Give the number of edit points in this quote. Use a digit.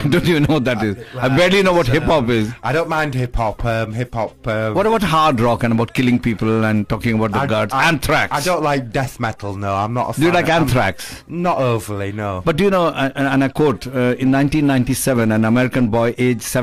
1